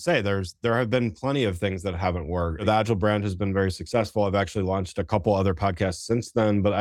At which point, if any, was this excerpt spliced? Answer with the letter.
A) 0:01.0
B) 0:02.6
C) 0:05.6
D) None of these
B